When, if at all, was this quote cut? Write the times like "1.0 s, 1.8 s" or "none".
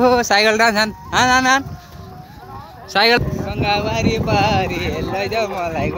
3.2 s